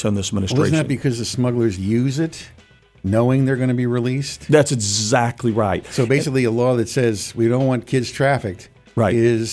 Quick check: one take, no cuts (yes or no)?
yes